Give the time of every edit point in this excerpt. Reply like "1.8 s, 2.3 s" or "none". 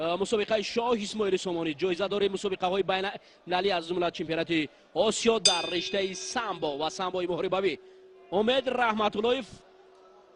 none